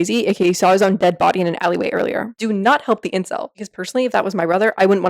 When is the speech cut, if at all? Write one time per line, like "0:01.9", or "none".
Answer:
0:02.3
0:03.6